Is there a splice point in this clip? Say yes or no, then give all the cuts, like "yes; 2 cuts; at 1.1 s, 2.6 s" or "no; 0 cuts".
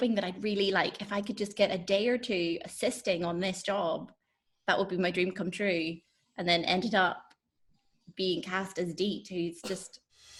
no; 0 cuts